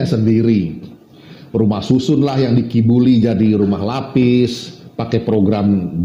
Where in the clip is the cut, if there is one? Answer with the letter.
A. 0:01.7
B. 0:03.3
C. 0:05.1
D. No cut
D